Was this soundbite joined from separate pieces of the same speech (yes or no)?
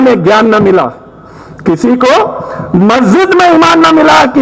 no